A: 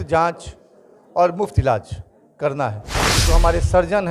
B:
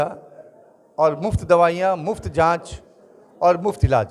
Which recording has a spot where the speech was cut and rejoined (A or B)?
A